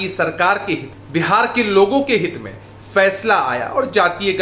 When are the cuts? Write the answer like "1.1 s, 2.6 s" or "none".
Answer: 0.9 s